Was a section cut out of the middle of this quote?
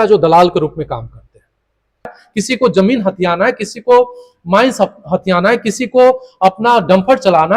yes; 1 cut; at 2.2 s

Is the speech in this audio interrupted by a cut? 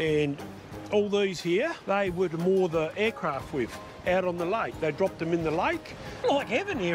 yes; 2 cuts; at 1.8 s, 6.1 s

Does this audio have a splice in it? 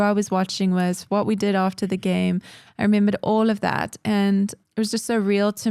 yes; 1 cut; at 4.6 s

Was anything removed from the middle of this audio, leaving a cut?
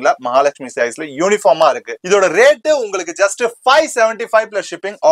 yes; 1 cut; at 1.9 s

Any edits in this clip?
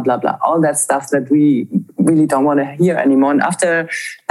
no; 0 cuts

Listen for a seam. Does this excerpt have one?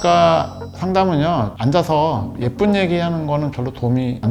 no; 0 cuts

